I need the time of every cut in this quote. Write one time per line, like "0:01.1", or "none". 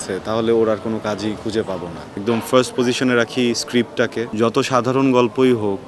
0:02.1
0:04.3